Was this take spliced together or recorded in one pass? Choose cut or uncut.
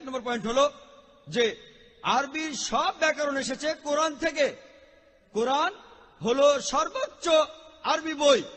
uncut